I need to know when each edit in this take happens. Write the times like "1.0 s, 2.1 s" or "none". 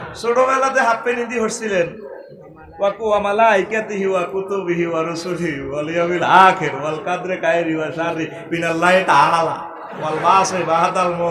none